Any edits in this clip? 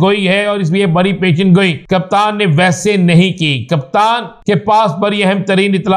yes; 2 cuts; at 1.8 s, 4.3 s

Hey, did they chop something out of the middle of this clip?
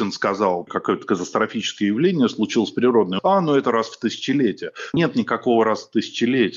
yes; 2 cuts; at 3.1 s, 4.9 s

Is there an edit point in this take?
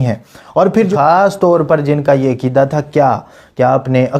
yes; 1 cut; at 0.9 s

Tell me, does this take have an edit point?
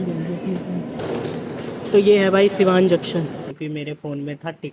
yes; 2 cuts; at 1.0 s, 3.5 s

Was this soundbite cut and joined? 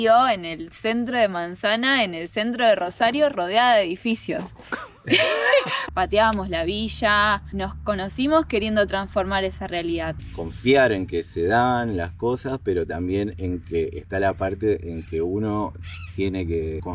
yes; 2 cuts; at 5.8 s, 10.2 s

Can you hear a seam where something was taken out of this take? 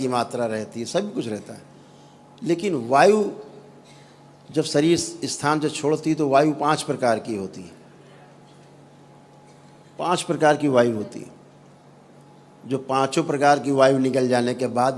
yes; 1 cut; at 12.2 s

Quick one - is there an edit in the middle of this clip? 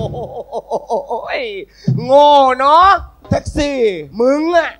no; 0 cuts

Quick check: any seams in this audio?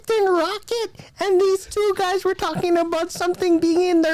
no; 0 cuts

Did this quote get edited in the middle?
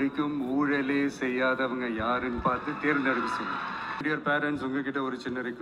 yes; 1 cut; at 4.0 s

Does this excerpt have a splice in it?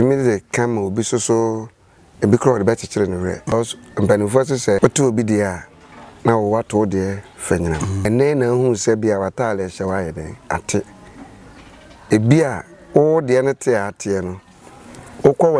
yes; 3 cuts; at 3.5 s, 4.8 s, 8.1 s

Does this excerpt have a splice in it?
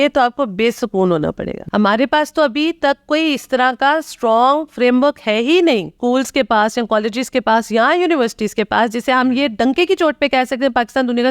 yes; 2 cuts; at 1.6 s, 5.9 s

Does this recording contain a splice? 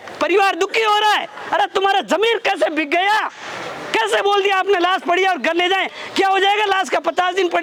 no; 0 cuts

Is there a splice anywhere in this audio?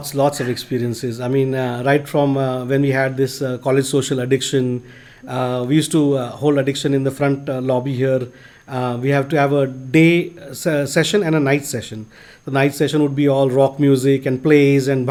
no; 0 cuts

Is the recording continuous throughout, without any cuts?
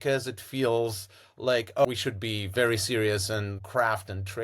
no; 2 cuts; at 1.8 s, 3.6 s

